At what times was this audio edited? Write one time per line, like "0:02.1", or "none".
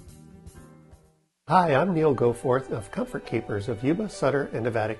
0:01.5